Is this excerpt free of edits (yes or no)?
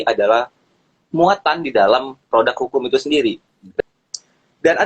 no